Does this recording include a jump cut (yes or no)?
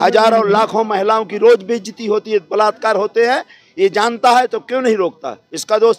no